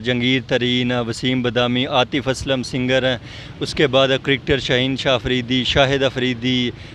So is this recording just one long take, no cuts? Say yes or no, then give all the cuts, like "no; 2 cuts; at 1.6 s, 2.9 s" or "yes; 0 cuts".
yes; 0 cuts